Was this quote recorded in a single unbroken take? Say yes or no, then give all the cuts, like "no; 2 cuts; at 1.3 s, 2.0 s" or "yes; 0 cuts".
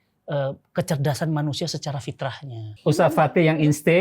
no; 1 cut; at 2.7 s